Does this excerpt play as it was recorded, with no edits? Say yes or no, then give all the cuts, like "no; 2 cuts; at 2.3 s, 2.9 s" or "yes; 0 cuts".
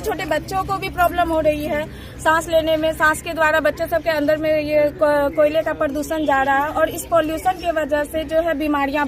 yes; 0 cuts